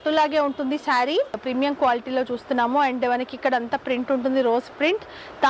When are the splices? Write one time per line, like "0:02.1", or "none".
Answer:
0:01.4